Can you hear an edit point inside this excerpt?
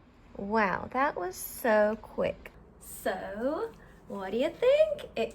yes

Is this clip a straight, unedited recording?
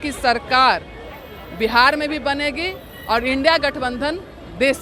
yes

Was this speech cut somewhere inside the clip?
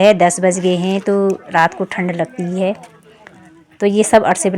no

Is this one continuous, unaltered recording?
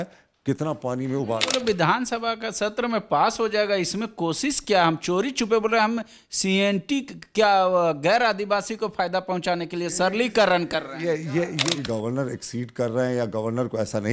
no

